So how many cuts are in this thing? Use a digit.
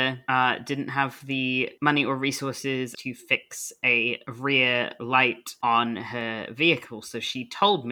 1